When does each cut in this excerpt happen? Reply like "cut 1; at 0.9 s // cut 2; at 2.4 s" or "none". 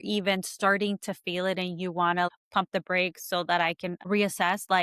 cut 1; at 2.3 s